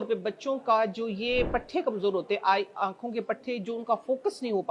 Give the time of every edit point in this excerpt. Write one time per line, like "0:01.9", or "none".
none